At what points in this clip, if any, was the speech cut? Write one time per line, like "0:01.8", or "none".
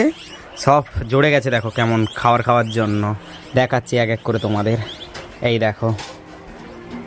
none